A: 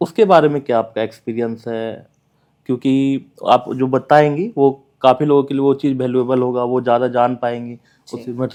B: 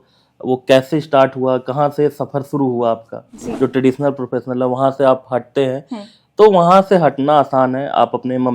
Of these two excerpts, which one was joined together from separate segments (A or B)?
B